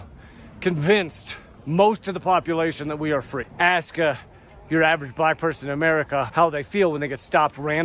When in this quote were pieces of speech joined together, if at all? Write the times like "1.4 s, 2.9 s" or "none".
3.4 s, 6.3 s